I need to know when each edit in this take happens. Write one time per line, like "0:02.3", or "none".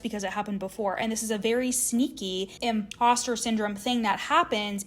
0:02.7